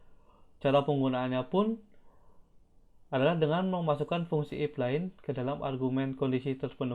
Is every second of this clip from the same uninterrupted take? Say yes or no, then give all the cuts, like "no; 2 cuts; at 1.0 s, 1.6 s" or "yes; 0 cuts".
yes; 0 cuts